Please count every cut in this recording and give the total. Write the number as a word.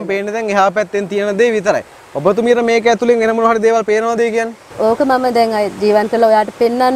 one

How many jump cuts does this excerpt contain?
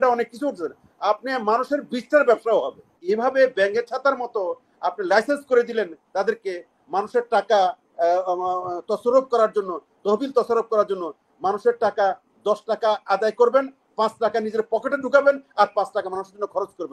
one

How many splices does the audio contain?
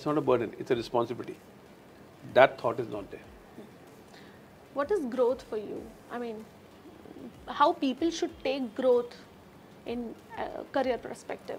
zero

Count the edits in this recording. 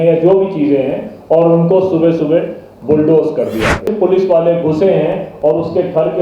one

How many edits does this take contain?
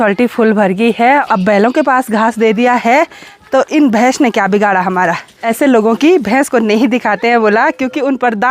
two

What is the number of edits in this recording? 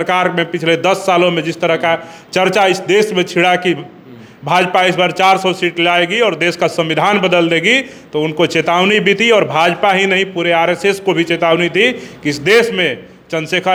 zero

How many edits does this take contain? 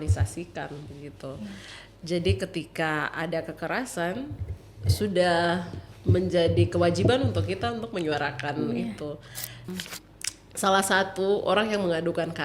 one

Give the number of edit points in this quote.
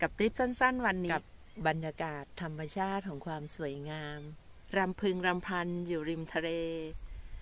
two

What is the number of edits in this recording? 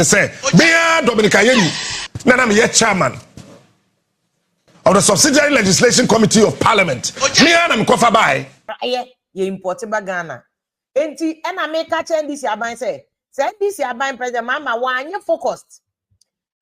one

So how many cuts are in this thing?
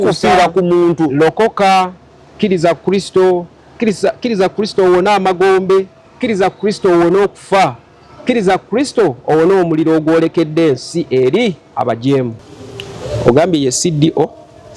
one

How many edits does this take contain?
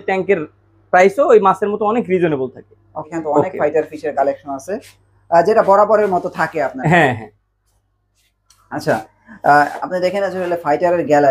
zero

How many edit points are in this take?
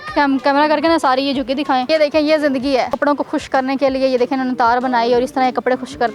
two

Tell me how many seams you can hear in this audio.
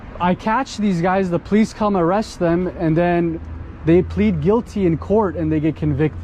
one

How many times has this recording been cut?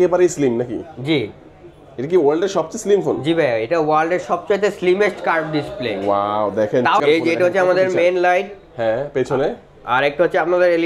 one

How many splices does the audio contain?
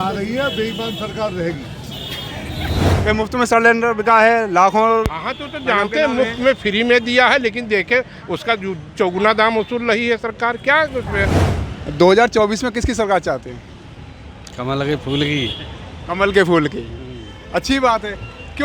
two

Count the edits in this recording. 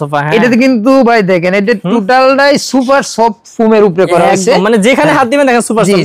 zero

